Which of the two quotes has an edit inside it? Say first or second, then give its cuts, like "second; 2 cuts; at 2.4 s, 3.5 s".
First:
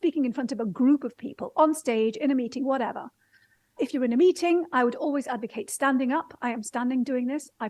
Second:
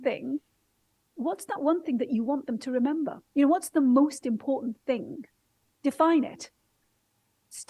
first; 1 cut; at 3.7 s